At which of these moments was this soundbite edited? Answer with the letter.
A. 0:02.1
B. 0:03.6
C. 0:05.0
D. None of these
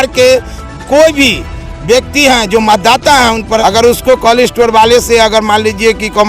B